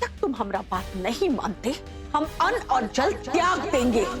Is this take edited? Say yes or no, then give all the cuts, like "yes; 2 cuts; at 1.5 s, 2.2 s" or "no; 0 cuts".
yes; 1 cut; at 1.9 s